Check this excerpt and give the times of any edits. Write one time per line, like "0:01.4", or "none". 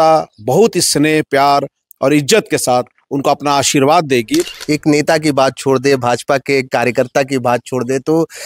0:04.6